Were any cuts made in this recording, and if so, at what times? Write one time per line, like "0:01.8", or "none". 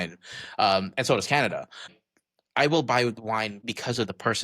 0:01.9
0:03.6